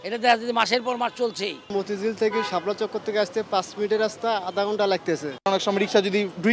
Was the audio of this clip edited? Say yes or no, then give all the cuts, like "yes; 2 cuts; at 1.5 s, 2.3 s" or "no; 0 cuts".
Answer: yes; 2 cuts; at 1.7 s, 5.5 s